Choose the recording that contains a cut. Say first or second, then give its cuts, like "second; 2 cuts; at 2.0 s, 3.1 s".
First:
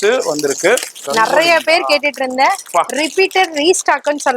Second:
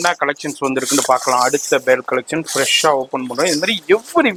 first; 1 cut; at 1.0 s